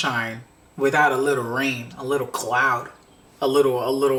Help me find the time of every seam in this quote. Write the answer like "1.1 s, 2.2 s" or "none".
none